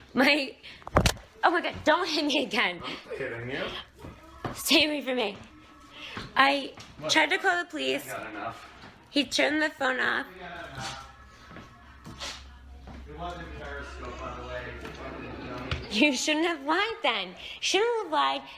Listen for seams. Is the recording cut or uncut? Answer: uncut